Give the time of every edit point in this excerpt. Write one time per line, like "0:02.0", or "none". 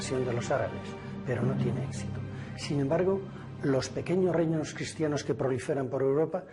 none

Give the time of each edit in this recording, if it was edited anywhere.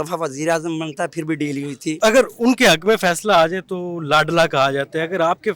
0:02.0

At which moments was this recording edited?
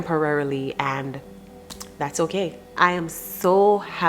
0:02.8

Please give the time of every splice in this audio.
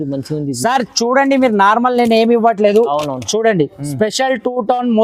none

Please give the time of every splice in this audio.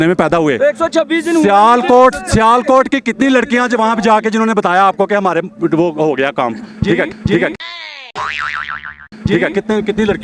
none

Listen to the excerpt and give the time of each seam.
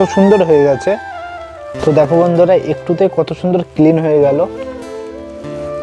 0:01.2

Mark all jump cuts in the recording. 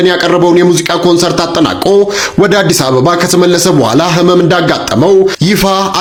none

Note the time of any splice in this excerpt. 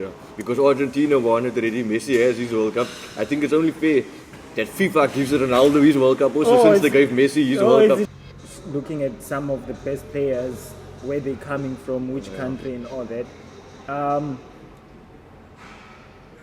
0:08.0

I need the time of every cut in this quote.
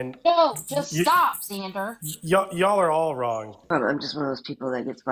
0:03.7

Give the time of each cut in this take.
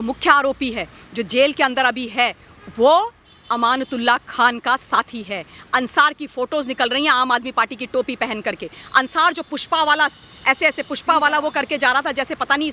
none

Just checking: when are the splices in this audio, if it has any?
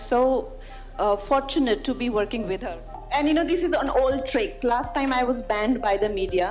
0:03.0

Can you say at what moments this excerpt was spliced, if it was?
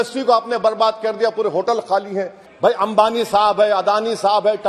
0:02.4

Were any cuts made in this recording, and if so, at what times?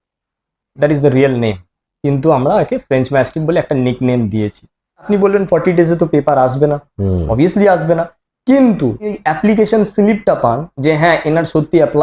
0:05.0
0:09.2

